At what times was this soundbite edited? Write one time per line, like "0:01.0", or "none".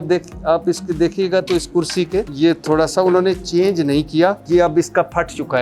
0:02.3
0:04.4